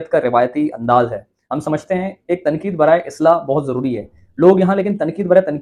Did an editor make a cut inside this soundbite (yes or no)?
no